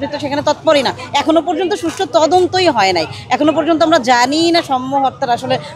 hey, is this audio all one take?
yes; 0 cuts

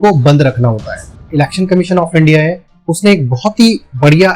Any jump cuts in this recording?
yes; 1 cut; at 1.2 s

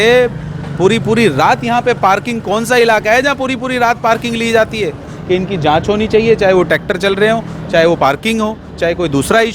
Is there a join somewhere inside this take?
yes; 1 cut; at 5.1 s

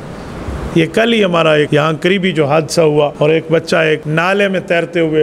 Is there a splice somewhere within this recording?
yes; 3 cuts; at 1.7 s, 3.1 s, 4.1 s

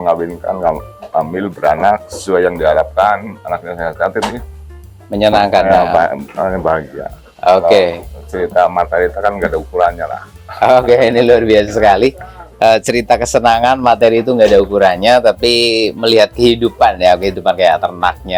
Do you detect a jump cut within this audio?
no; 0 cuts

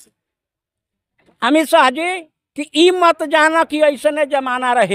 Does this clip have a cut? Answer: no; 0 cuts

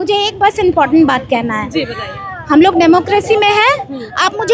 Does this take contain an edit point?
no; 0 cuts

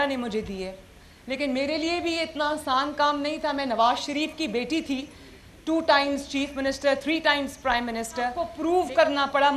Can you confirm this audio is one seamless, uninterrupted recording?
no; 1 cut; at 8.4 s

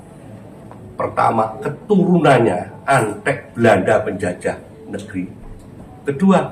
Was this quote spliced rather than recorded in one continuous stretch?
no; 0 cuts

